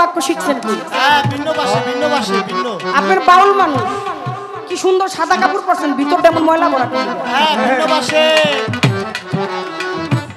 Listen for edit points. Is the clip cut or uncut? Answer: uncut